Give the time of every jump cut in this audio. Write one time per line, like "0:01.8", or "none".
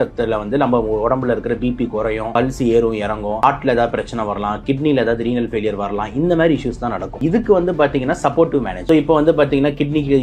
0:02.3
0:03.4
0:07.1
0:08.7